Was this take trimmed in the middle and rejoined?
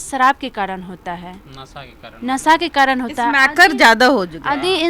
no; 0 cuts

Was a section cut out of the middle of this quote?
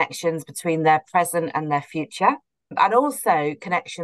yes; 1 cut; at 2.7 s

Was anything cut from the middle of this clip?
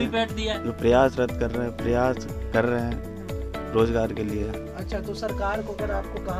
no; 0 cuts

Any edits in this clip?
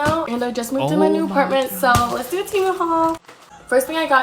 no; 0 cuts

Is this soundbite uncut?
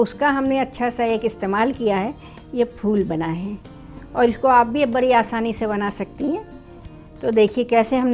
yes; 0 cuts

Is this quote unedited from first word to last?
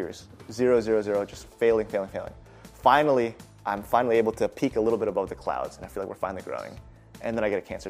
yes; 0 cuts

